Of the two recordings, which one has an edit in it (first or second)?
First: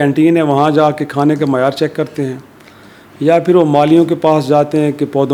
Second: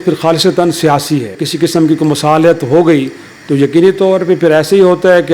second